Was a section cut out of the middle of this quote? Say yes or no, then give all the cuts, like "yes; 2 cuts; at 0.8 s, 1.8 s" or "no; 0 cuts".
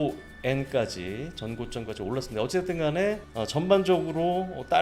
yes; 1 cut; at 3.3 s